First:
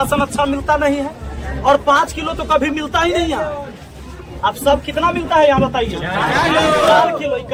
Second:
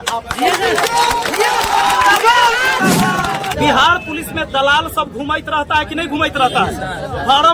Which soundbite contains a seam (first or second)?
second